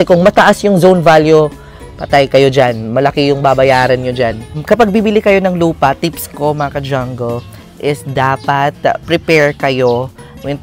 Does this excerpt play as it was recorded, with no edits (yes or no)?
no